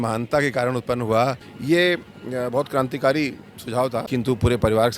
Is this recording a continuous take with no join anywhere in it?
no; 2 cuts; at 1.5 s, 4.1 s

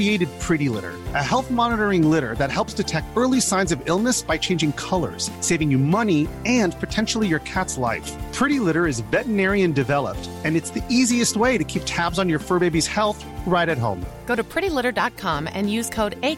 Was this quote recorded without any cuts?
yes; 0 cuts

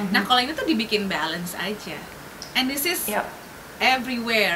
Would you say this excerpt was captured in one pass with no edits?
yes; 0 cuts

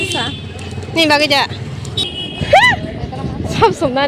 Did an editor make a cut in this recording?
yes; 1 cut; at 2.0 s

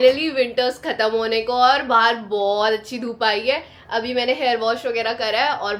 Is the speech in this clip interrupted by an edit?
no; 0 cuts

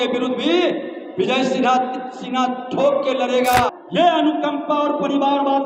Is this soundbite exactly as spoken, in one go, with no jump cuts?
no; 1 cut; at 3.7 s

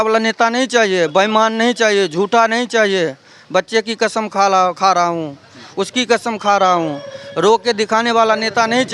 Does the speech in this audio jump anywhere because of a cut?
no; 0 cuts

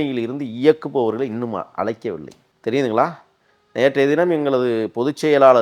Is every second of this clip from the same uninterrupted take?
yes; 0 cuts

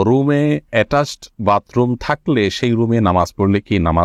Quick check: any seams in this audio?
no; 0 cuts

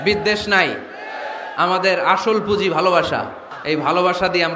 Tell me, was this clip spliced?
yes; 1 cut; at 3.5 s

